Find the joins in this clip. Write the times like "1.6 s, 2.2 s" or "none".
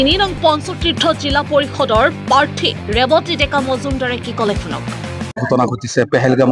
none